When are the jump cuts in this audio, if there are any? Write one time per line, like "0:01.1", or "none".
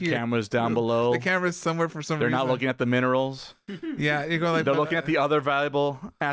none